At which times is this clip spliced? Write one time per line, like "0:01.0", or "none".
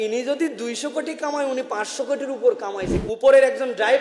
0:02.9

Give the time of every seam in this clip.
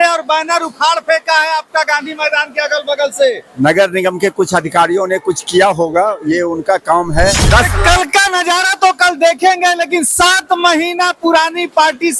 0:07.4

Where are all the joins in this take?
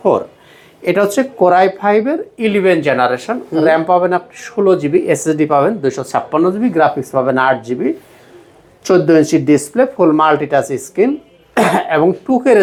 none

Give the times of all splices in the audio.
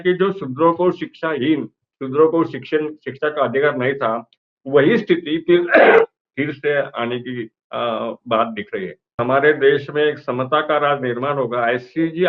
0:09.2

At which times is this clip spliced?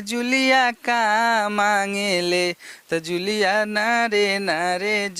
none

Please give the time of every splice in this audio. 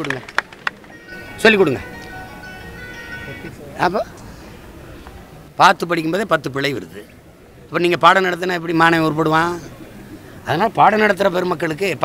none

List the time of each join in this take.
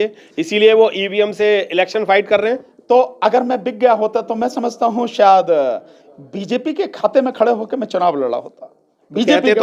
none

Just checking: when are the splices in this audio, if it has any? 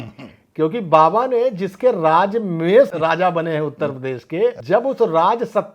0:02.9
0:04.6

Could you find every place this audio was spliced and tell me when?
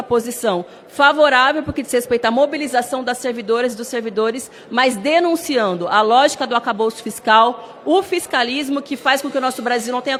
none

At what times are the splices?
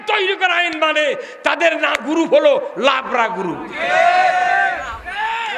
none

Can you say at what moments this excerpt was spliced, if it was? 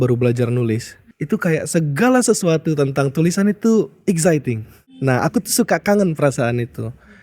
0:00.9
0:05.2

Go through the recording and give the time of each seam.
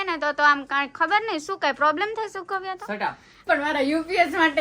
0:03.4

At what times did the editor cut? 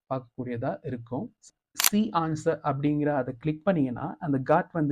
0:01.4

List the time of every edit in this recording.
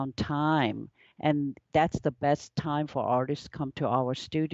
none

